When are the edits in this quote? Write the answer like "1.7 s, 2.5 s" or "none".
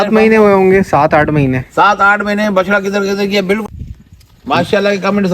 3.6 s

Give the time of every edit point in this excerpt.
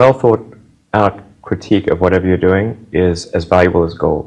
none

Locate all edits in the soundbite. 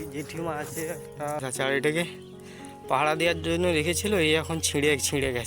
1.4 s

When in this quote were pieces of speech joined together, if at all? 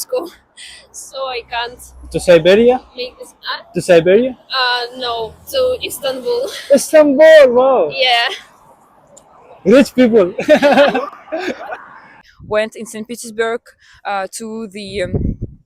12.2 s

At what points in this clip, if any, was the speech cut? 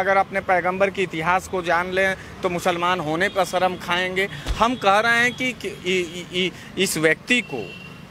none

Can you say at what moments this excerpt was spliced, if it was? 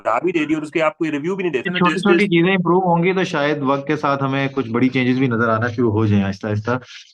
1.7 s

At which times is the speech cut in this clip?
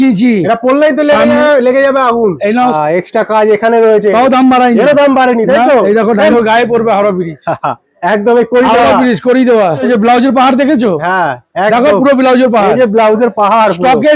2.7 s, 6.3 s, 9.8 s

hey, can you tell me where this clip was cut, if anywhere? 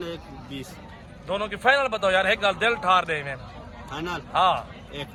none

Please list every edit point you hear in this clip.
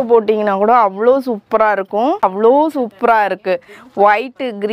2.2 s

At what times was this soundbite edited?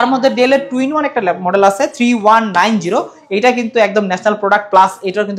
none

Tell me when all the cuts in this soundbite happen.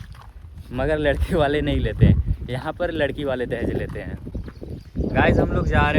4.3 s

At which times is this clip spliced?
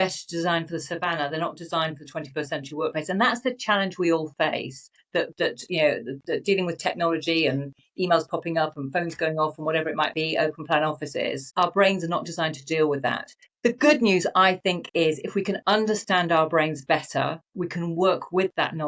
none

